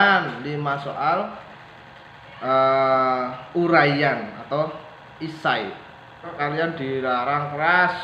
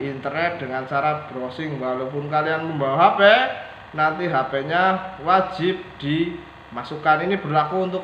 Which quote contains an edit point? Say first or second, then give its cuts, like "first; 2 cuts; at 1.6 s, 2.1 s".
first; 1 cut; at 6.3 s